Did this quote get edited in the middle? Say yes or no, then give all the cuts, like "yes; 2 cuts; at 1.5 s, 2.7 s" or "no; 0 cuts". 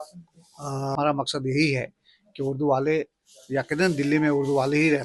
yes; 1 cut; at 0.9 s